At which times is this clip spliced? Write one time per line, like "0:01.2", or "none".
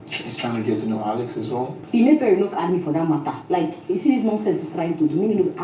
none